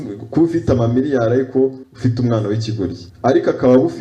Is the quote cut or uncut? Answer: cut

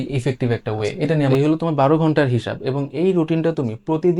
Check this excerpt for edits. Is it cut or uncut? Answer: cut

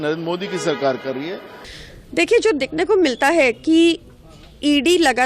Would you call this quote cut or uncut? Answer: cut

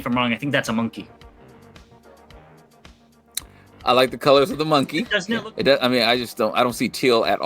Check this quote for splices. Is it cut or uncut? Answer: cut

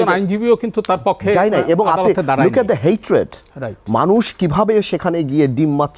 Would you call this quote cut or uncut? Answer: uncut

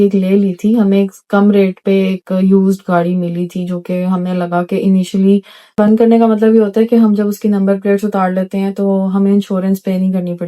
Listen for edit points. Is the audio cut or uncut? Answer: cut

